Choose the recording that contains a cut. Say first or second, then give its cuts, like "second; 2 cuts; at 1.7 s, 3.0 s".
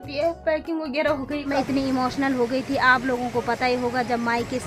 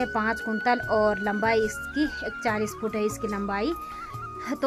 first; 1 cut; at 1.6 s